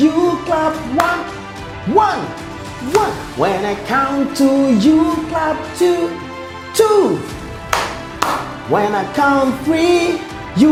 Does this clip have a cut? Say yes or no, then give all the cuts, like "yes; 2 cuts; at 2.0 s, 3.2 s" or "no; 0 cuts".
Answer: no; 0 cuts